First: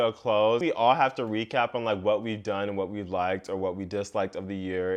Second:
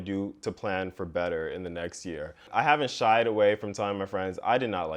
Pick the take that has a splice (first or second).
second